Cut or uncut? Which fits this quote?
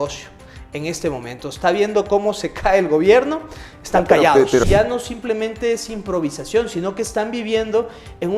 cut